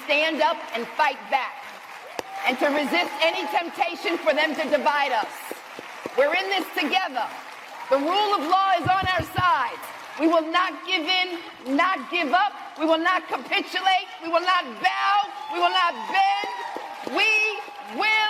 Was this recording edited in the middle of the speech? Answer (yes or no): no